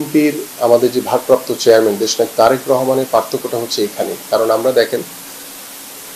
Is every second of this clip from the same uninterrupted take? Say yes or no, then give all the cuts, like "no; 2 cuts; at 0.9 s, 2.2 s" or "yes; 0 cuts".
yes; 0 cuts